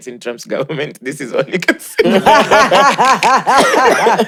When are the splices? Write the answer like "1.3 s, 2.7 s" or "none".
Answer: none